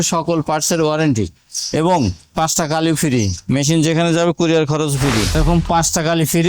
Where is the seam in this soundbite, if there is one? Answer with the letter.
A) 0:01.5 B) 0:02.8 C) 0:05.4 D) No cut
C